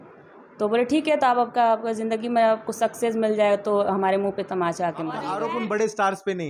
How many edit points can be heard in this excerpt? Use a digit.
1